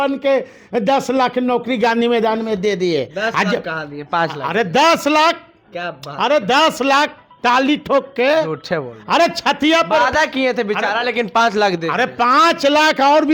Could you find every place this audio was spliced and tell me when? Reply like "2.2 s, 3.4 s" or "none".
none